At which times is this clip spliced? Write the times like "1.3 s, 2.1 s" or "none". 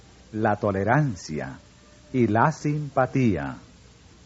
none